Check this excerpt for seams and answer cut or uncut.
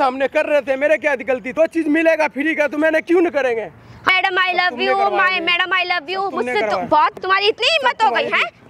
cut